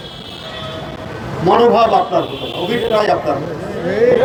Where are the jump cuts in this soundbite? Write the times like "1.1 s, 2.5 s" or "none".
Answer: none

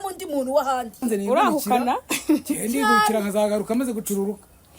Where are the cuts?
1.0 s

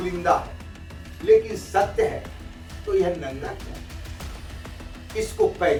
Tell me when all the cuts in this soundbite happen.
none

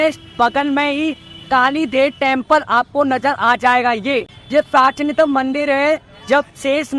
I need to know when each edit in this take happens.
4.4 s

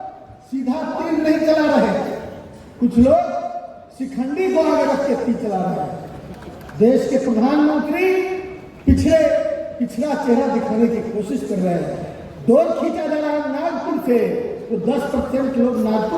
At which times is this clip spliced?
none

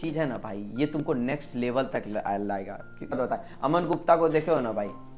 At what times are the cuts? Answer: 3.1 s

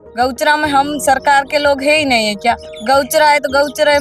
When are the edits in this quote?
2.7 s

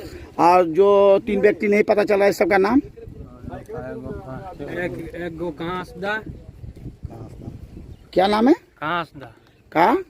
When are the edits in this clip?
none

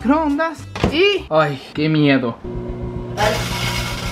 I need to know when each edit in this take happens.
2.4 s

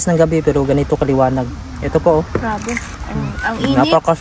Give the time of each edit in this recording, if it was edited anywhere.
none

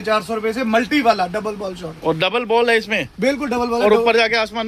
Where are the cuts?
none

